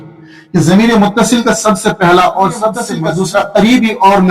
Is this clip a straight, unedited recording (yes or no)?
no